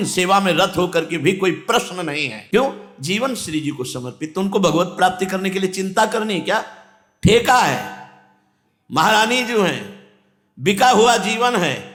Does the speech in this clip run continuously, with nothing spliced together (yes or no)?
yes